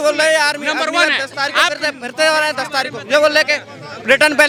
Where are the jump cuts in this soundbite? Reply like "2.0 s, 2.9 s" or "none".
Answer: none

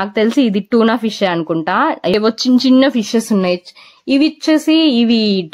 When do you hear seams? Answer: 2.1 s

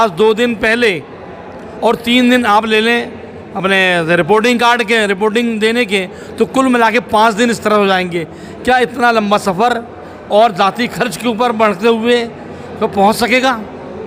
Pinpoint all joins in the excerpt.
none

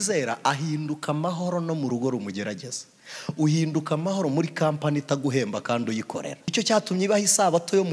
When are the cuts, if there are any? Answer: 6.5 s

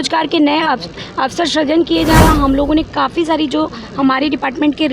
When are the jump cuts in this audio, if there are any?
2.2 s

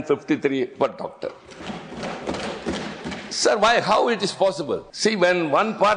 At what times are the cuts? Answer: 1.6 s, 4.9 s

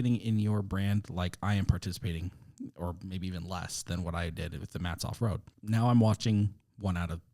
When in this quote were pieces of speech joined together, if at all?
5.5 s

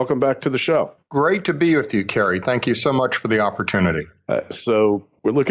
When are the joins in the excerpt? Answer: 1.8 s

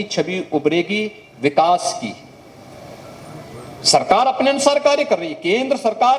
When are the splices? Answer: none

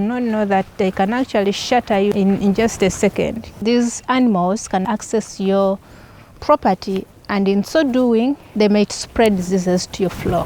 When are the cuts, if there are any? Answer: 2.1 s, 3.5 s, 4.8 s, 8.4 s

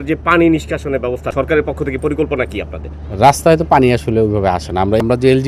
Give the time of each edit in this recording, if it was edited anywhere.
1.3 s

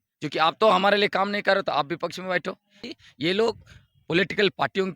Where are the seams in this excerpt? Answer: 2.8 s

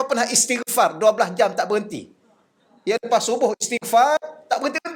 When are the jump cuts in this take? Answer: none

